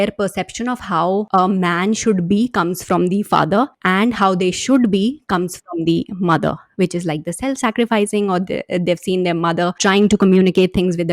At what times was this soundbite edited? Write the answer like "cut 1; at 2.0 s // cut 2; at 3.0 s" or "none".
cut 1; at 1.3 s // cut 2; at 3.8 s // cut 3; at 9.8 s

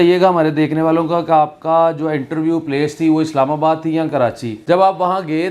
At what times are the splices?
cut 1; at 4.5 s

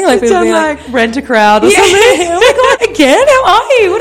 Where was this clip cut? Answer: cut 1; at 2.8 s

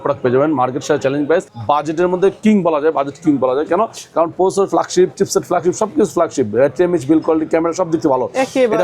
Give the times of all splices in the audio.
cut 1; at 1.5 s

